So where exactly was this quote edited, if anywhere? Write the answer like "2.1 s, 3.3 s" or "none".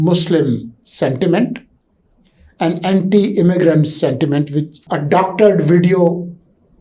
4.8 s